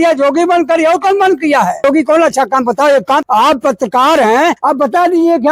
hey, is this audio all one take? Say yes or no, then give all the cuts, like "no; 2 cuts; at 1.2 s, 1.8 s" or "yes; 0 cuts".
no; 3 cuts; at 1.8 s, 3.3 s, 4.6 s